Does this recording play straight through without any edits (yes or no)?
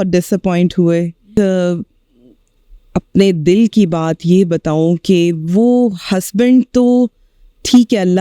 no